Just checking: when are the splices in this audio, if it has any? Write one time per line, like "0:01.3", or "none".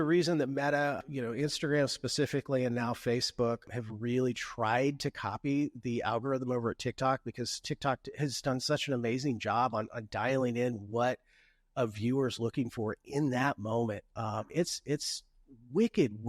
0:01.0
0:03.7